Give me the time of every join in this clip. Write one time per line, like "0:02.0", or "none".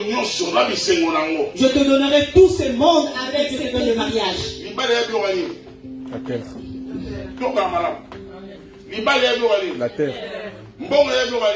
0:03.6

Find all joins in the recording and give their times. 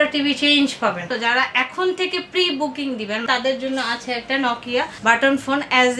0:01.1
0:03.2
0:04.9

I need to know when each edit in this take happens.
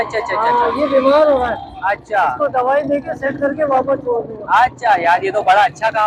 none

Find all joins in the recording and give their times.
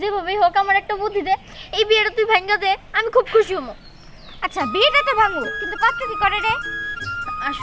none

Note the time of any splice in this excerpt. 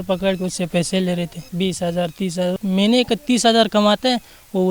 0:01.4
0:02.5

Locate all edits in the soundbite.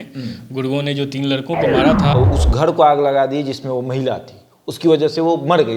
0:02.1

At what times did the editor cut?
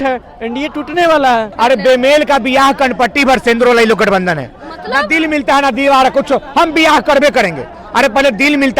0:01.5

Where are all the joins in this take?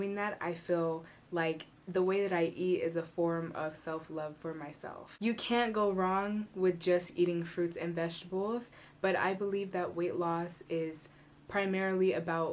none

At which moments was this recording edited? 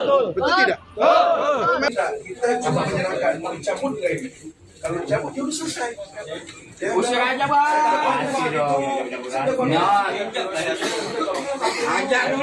0:01.9

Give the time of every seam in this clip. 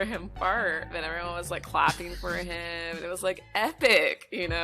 0:01.0

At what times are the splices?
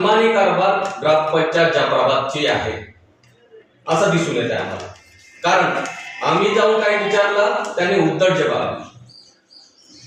none

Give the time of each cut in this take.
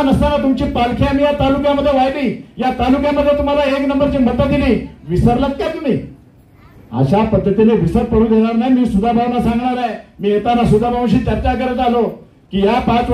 none

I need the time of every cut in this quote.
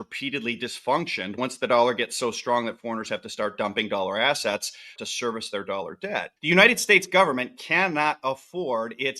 0:01.4
0:05.0
0:06.3

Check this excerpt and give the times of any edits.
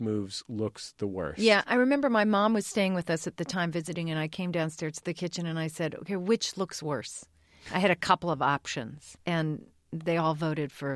0:09.1

